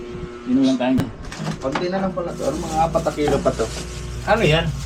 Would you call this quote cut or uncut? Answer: cut